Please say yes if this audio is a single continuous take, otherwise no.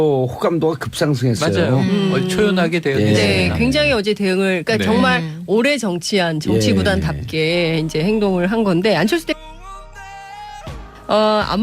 no